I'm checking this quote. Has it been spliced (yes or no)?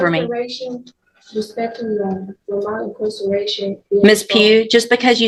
no